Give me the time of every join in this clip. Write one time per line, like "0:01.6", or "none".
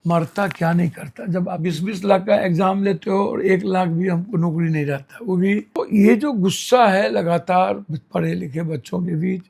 0:01.6
0:05.8